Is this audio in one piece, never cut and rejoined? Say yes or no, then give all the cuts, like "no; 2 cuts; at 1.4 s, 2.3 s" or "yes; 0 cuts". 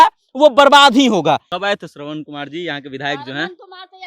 no; 1 cut; at 1.5 s